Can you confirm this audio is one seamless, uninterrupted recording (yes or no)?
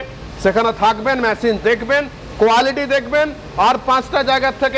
yes